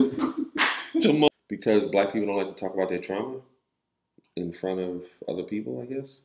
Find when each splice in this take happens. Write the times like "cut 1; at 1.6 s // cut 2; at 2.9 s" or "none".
cut 1; at 1.3 s